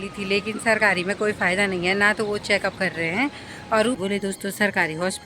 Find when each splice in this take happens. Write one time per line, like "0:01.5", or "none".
0:04.0